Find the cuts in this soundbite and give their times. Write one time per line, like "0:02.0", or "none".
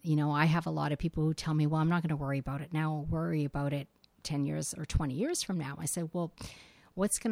none